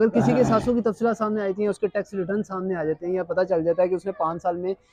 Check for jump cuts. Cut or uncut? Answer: uncut